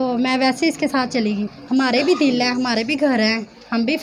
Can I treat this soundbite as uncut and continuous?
no; 1 cut; at 1.5 s

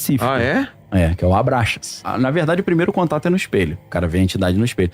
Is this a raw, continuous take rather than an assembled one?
no; 2 cuts; at 2.0 s, 3.8 s

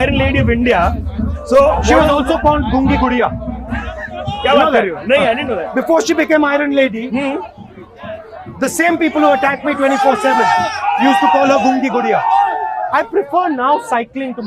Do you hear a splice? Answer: yes; 1 cut; at 12.8 s

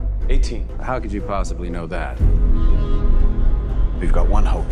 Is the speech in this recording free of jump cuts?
yes; 0 cuts

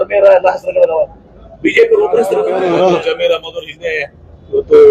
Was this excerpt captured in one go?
no; 1 cut; at 2.5 s

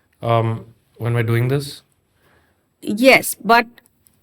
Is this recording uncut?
yes; 0 cuts

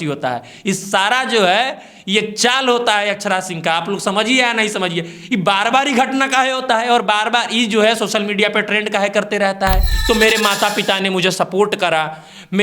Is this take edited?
yes; 1 cut; at 9.9 s

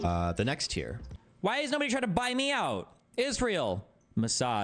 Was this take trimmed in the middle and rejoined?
yes; 1 cut; at 1.0 s

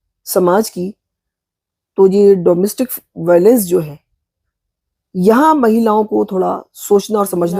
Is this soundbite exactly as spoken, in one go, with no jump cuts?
yes; 0 cuts

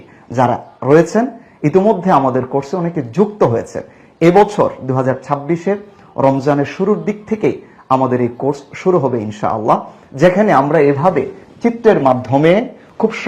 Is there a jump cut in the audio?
no; 0 cuts

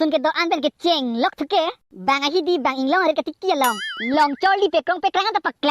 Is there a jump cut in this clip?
no; 0 cuts

